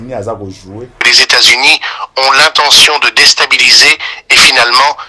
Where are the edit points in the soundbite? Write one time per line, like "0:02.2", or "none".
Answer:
0:01.0